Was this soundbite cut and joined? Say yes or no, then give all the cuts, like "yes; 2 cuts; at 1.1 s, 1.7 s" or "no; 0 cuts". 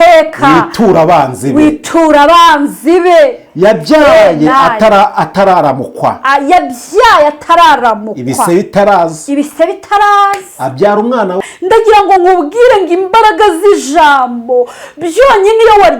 yes; 1 cut; at 11.5 s